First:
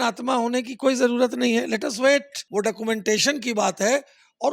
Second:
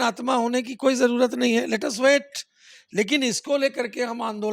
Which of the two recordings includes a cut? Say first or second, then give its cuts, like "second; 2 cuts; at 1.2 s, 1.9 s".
first; 1 cut; at 2.4 s